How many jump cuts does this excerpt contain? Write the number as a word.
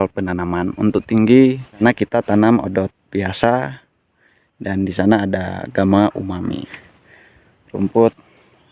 two